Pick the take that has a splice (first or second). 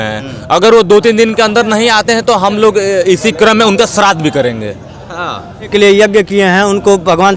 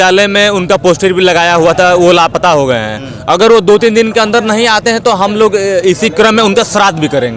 first